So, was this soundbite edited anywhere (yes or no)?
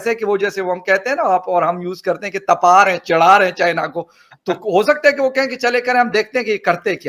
no